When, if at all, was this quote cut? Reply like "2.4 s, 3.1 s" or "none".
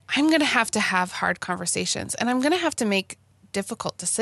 none